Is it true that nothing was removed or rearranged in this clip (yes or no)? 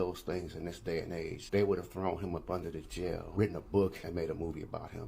no